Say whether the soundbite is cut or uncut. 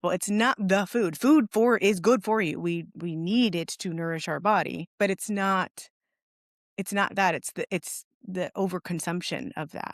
cut